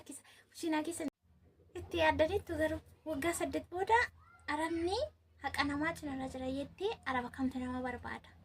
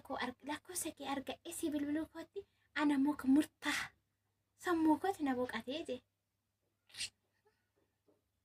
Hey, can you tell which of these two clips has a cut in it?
first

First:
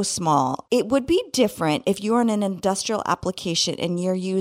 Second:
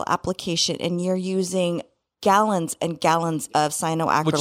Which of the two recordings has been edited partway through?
second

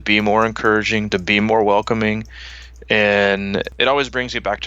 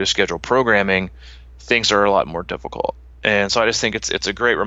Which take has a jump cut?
first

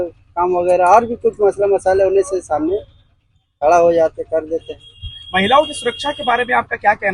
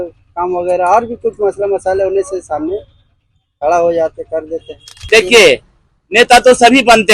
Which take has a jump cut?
second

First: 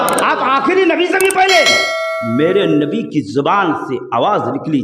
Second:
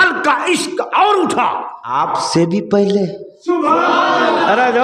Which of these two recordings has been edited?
second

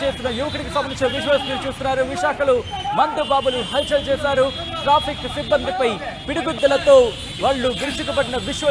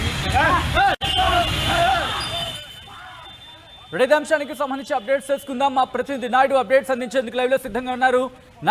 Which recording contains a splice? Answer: second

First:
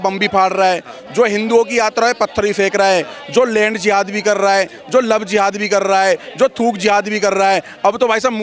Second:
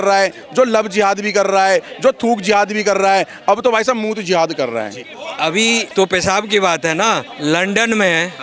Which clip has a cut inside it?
second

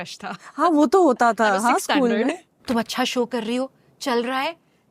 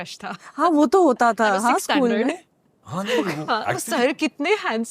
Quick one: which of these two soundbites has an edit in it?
first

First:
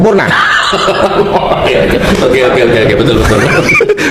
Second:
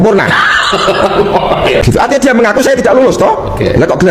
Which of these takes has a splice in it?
second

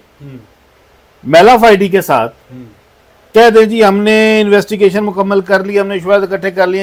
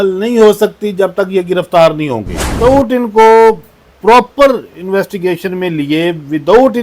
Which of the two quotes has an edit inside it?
second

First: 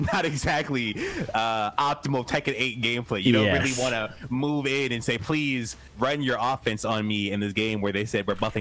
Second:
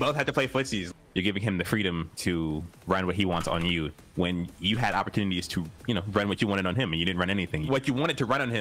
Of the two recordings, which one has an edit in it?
second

